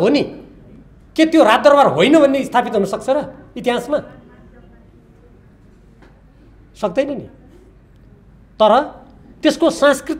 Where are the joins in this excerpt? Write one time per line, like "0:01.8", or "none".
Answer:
none